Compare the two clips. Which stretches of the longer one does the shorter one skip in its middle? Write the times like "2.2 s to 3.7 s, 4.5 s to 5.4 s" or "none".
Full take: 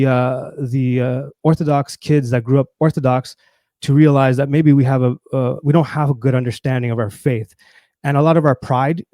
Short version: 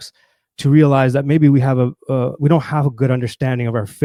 none